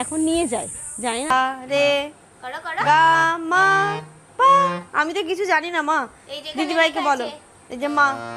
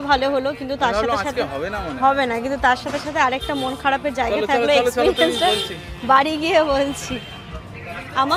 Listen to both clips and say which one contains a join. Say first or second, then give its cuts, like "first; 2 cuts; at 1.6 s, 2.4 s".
first; 1 cut; at 1.3 s